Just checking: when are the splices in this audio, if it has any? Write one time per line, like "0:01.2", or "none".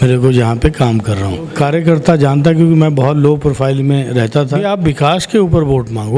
0:01.5
0:04.6